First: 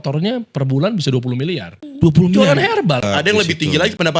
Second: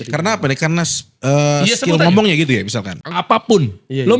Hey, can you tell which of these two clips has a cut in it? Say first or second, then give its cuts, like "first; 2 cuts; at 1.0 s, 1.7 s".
first; 2 cuts; at 1.8 s, 3.0 s